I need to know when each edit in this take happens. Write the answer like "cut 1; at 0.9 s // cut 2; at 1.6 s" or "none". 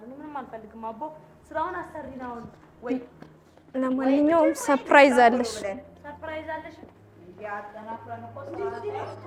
none